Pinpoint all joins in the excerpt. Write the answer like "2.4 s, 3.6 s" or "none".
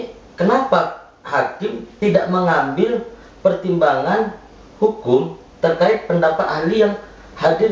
1.9 s